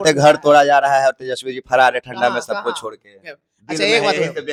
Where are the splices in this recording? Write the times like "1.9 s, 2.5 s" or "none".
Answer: none